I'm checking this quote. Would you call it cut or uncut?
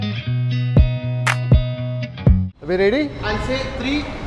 uncut